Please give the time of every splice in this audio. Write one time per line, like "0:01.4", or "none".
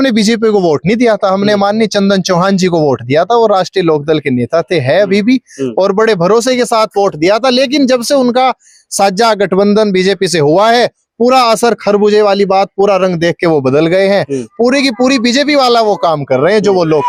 none